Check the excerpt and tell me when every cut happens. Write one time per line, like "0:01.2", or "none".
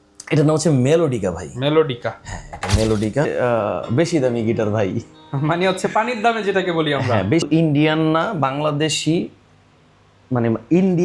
0:03.3
0:07.4